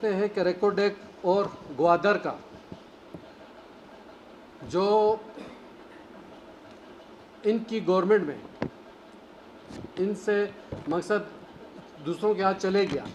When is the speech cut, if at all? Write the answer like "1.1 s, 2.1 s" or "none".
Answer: none